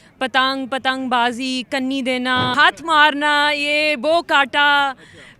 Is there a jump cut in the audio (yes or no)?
yes